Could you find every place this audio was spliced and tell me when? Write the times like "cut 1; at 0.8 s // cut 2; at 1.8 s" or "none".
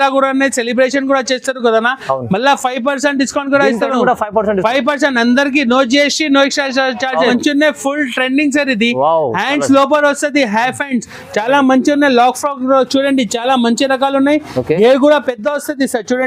cut 1; at 7.3 s